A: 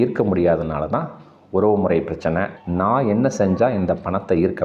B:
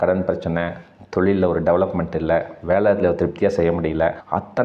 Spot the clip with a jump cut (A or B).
A